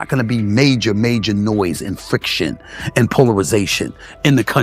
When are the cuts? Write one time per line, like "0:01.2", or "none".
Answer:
none